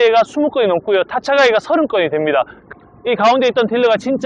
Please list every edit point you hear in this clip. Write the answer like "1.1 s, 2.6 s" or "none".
2.6 s